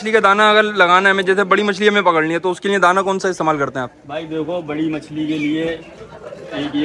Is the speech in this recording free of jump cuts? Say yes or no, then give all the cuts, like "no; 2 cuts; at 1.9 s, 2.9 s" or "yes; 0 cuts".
yes; 0 cuts